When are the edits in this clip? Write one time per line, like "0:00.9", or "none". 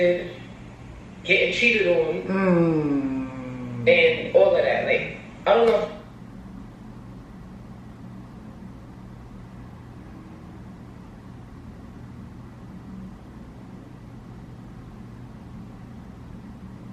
none

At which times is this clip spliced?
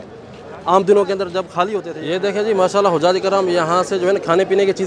0:02.0

